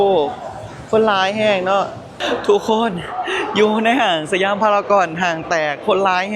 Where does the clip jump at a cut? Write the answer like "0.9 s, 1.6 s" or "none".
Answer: 2.1 s